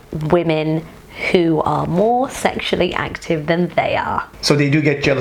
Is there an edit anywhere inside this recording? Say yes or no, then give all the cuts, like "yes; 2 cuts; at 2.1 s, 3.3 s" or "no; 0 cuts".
no; 0 cuts